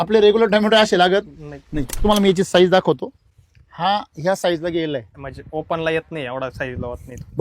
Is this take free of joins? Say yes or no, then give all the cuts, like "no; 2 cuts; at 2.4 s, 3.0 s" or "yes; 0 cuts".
no; 2 cuts; at 2.0 s, 5.2 s